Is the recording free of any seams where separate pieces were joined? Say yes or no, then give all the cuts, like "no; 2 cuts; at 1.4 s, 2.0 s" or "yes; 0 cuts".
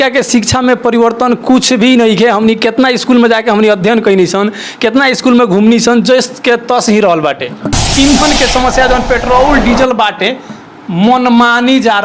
no; 1 cut; at 7.7 s